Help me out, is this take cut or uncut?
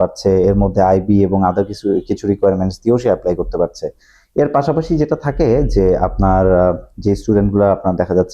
uncut